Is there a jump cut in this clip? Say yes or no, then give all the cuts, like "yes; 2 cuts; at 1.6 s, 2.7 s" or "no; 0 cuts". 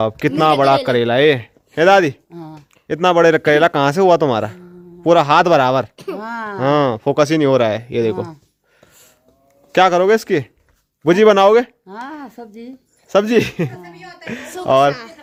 no; 0 cuts